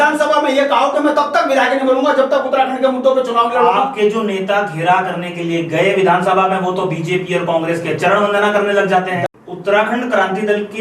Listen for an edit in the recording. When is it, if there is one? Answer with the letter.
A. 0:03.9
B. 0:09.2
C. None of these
B